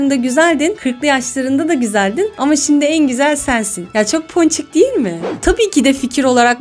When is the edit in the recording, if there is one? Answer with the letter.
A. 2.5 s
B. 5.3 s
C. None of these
B